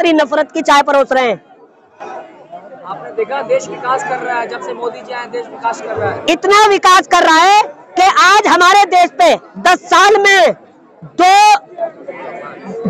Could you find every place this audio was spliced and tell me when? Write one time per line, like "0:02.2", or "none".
none